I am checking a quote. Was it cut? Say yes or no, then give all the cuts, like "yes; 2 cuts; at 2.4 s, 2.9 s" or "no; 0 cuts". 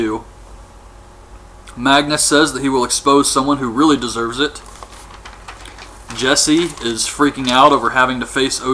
yes; 1 cut; at 6.2 s